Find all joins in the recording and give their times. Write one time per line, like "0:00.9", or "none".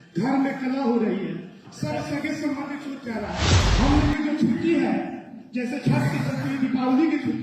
0:03.6